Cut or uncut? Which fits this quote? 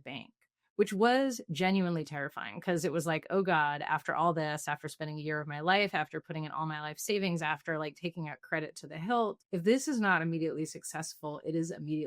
cut